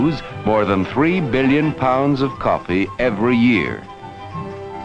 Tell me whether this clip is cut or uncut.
uncut